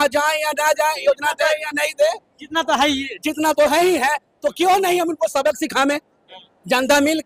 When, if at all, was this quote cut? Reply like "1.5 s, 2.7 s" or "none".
none